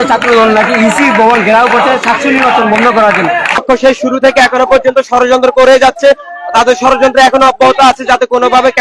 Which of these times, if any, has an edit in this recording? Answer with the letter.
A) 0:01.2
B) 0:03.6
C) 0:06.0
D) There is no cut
B